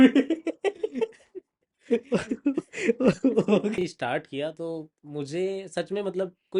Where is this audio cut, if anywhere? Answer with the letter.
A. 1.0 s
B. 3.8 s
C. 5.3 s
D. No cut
B